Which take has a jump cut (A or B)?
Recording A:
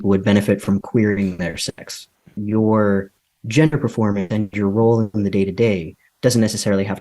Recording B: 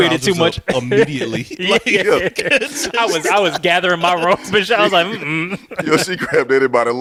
A